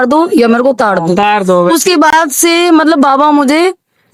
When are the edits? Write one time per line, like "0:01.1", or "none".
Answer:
none